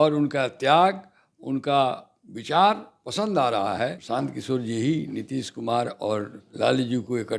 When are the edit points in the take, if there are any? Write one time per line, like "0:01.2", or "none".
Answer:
0:04.0
0:06.4